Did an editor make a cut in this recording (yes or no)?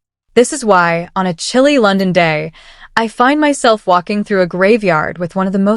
no